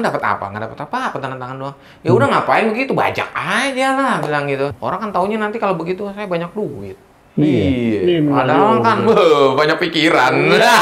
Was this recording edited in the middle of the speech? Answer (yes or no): yes